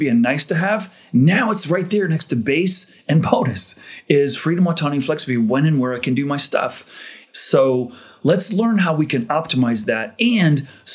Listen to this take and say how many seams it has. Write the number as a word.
one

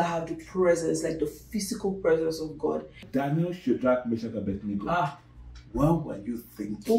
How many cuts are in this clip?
one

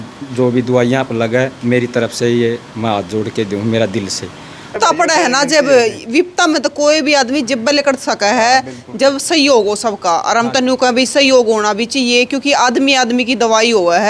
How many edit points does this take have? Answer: one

